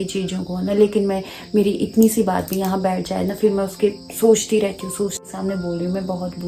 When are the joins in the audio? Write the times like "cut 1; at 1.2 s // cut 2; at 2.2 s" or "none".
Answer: cut 1; at 5.2 s